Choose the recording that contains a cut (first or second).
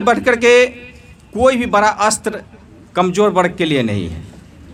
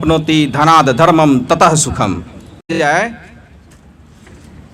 second